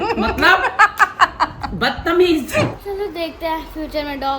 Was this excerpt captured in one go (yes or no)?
no